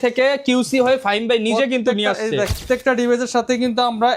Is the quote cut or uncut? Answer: cut